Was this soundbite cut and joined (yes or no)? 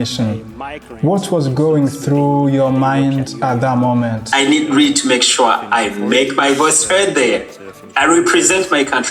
yes